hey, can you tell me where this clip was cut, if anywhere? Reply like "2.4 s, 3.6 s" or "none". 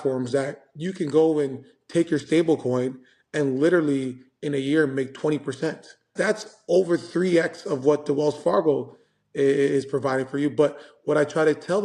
6.1 s